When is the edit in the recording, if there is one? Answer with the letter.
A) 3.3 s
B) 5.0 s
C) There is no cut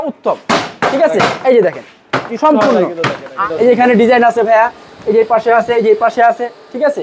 A